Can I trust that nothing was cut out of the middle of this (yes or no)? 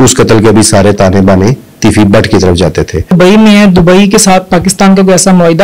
no